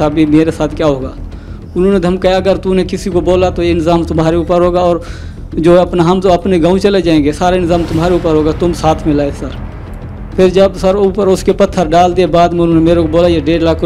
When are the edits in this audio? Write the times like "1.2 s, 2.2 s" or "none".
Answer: none